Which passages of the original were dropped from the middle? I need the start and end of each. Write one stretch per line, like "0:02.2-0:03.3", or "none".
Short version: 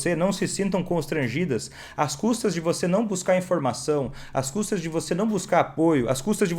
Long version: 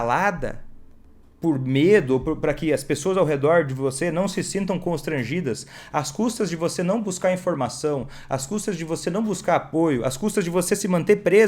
none